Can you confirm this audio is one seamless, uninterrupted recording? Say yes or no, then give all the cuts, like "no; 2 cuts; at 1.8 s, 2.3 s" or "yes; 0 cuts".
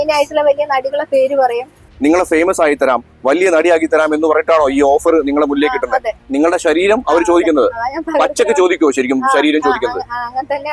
no; 2 cuts; at 1.9 s, 6.2 s